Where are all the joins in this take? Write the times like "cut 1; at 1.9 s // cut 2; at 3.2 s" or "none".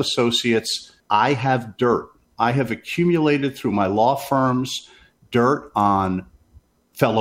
cut 1; at 1.0 s